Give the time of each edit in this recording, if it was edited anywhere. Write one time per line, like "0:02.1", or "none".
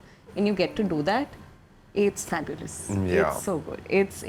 none